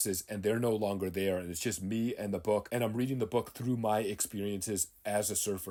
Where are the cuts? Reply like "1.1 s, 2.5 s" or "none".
none